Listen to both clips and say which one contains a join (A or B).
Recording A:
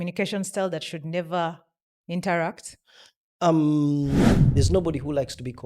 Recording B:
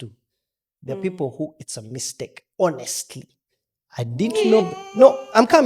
A